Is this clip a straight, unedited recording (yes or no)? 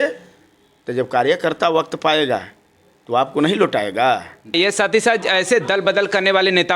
no